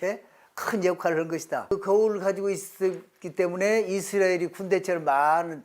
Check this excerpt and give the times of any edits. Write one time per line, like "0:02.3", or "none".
0:01.7